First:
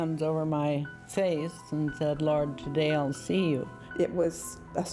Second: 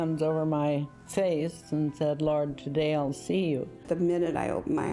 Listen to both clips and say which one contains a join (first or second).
first